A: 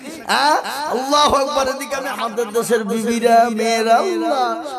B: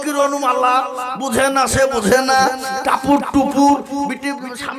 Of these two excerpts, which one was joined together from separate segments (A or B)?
A